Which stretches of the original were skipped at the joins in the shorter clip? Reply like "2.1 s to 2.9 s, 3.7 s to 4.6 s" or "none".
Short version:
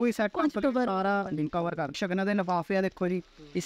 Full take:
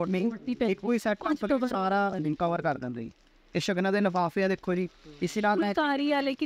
2.7 s to 3.5 s